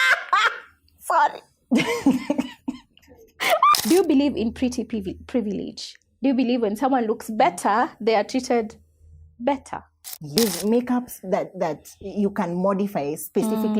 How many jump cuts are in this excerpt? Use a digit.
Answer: 2